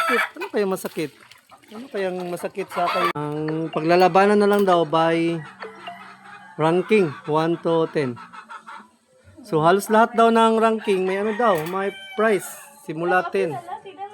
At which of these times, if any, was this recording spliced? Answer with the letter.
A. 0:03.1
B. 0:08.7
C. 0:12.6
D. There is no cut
A